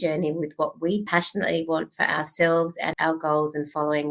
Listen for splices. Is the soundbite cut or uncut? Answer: cut